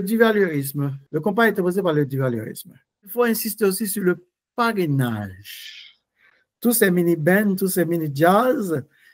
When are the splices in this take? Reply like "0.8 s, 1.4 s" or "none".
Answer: 1.0 s, 3.1 s